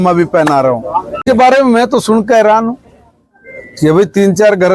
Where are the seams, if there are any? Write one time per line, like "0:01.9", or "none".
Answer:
0:01.2